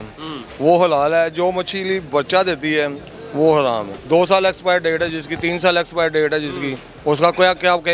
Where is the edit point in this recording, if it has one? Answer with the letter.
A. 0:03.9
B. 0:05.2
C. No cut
A